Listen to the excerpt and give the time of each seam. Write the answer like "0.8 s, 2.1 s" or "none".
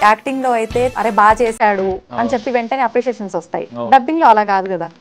0.9 s